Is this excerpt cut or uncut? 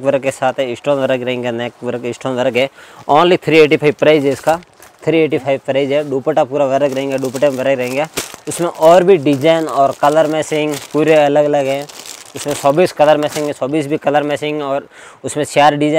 uncut